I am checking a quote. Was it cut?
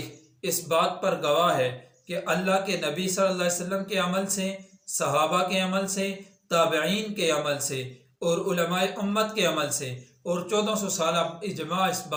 no; 0 cuts

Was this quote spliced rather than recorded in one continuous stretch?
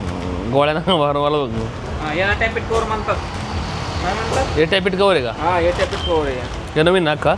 no; 0 cuts

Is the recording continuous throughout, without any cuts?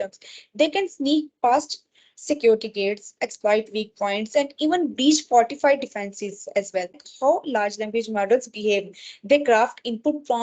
no; 1 cut; at 7.1 s

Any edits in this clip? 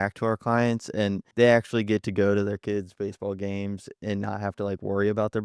yes; 1 cut; at 1.2 s

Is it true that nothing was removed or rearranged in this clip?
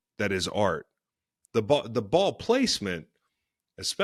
yes; 0 cuts

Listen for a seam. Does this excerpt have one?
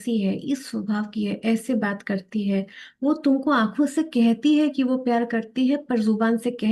no; 0 cuts

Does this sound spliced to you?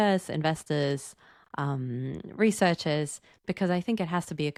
no; 0 cuts

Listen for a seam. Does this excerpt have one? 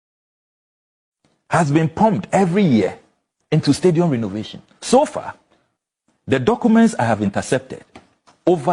no; 0 cuts

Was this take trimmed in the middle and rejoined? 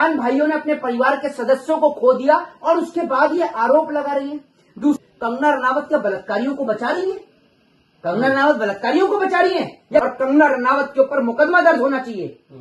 yes; 2 cuts; at 5.0 s, 10.0 s

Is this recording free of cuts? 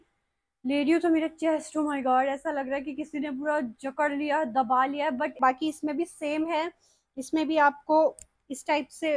no; 1 cut; at 5.4 s

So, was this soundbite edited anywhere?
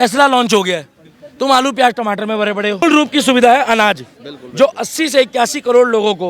yes; 1 cut; at 2.8 s

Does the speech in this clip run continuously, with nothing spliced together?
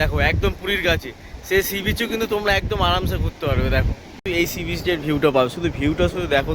no; 1 cut; at 4.2 s

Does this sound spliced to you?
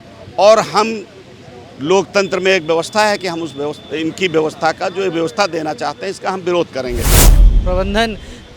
yes; 1 cut; at 7.3 s

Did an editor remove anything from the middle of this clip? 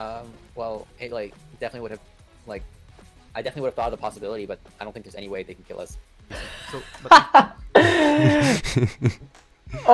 yes; 2 cuts; at 0.9 s, 6.2 s

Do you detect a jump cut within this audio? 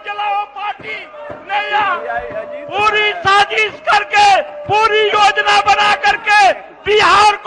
no; 0 cuts

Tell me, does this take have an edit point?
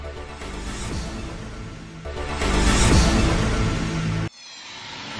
yes; 1 cut; at 4.2 s

